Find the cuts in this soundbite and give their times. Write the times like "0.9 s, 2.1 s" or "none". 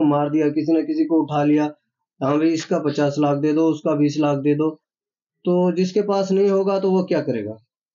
none